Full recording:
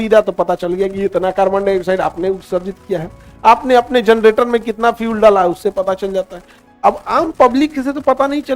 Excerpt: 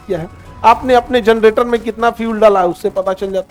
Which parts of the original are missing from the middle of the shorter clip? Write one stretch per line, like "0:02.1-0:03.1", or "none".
none